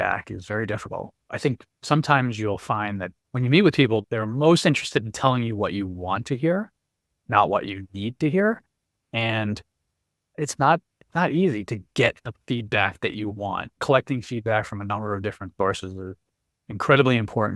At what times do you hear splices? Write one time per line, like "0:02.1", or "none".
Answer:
0:01.4
0:03.1
0:04.0
0:10.4
0:13.8